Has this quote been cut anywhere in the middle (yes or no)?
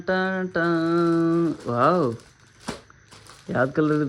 no